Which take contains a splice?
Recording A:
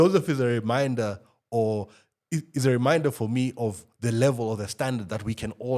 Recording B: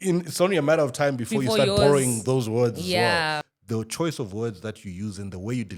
B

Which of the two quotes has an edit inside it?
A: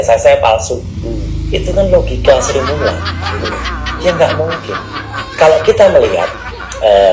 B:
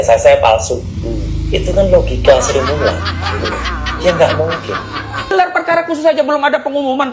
B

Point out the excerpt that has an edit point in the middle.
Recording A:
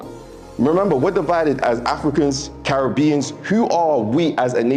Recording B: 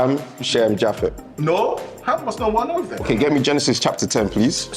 B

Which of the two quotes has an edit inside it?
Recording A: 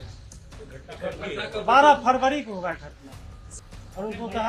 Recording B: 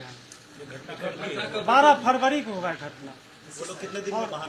A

